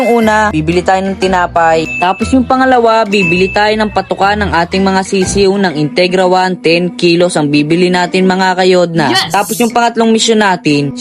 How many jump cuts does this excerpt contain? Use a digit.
0